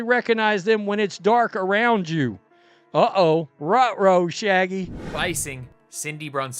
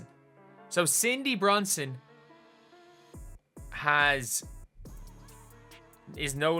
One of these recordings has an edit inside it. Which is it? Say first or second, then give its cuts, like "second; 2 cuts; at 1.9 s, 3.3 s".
first; 1 cut; at 5.0 s